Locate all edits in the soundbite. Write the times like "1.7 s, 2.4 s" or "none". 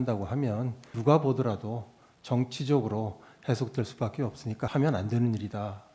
0.9 s, 4.7 s